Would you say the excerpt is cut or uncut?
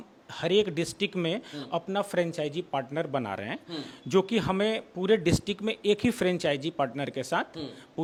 uncut